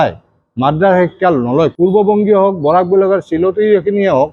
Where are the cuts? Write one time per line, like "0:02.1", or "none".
0:01.7